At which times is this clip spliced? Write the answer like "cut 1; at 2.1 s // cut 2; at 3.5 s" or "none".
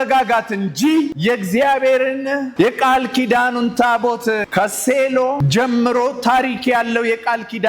cut 1; at 1.1 s // cut 2; at 2.5 s // cut 3; at 4.5 s // cut 4; at 5.4 s